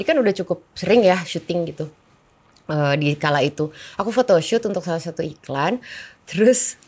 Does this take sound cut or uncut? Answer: uncut